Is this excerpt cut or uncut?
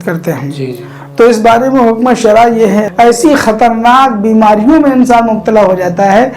cut